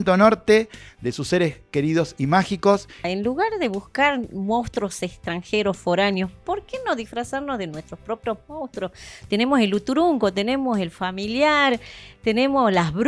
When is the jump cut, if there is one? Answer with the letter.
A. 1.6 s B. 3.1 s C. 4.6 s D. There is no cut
B